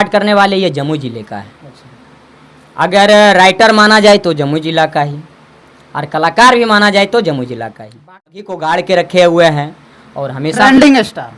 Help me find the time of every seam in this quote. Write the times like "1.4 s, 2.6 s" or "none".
8.4 s